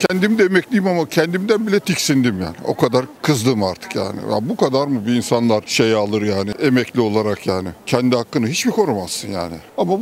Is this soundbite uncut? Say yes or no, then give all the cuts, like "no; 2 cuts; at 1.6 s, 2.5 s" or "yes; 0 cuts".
yes; 0 cuts